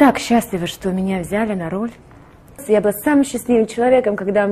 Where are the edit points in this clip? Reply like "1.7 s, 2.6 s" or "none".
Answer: 2.6 s